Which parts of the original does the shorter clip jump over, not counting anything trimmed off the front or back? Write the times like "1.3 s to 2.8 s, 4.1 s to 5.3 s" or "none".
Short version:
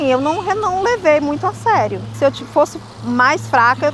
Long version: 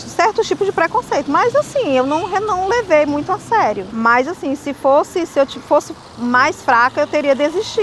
4.0 s to 5.3 s